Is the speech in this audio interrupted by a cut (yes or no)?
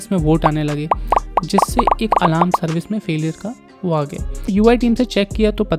yes